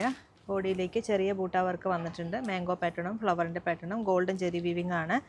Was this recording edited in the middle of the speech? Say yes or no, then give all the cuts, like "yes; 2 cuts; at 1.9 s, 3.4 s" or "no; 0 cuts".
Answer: no; 0 cuts